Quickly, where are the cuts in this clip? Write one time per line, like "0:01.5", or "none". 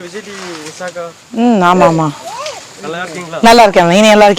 none